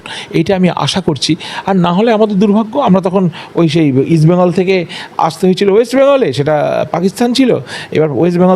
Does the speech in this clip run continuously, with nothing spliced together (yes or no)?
yes